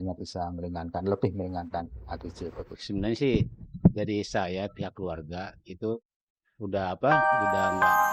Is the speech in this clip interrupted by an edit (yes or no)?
yes